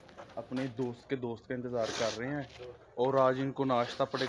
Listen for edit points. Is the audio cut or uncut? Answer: uncut